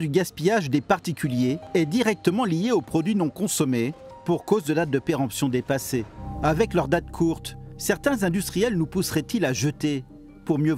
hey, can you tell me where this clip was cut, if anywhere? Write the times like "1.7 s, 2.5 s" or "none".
1.6 s, 4.1 s, 6.2 s